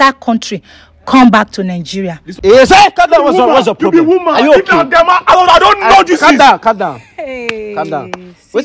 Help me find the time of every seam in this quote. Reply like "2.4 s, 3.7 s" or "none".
2.2 s